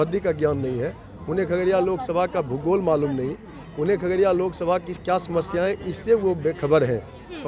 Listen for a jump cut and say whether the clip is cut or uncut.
uncut